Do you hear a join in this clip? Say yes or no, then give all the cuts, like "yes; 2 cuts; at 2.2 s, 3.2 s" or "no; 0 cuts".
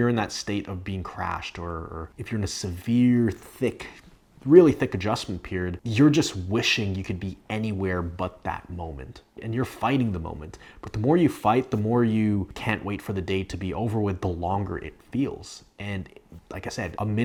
no; 0 cuts